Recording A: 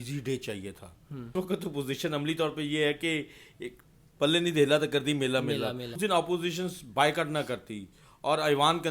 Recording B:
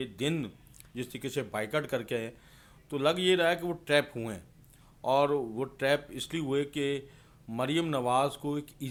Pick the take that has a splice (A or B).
A